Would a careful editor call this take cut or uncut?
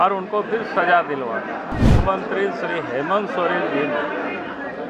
cut